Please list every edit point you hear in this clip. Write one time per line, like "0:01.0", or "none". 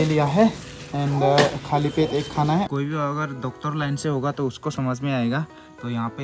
0:02.7